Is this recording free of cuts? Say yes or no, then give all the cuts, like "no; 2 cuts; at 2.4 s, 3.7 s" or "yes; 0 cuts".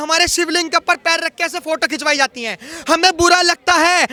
yes; 0 cuts